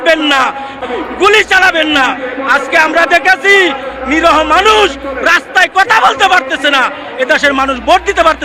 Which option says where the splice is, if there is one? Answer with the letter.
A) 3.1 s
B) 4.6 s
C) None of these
C